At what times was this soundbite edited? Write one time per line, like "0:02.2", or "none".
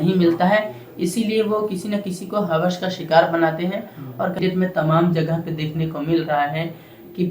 0:04.4